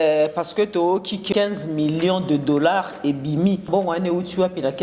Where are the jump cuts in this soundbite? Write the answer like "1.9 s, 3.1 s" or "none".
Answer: 1.2 s, 3.6 s